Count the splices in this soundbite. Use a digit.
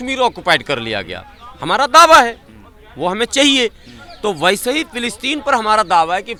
0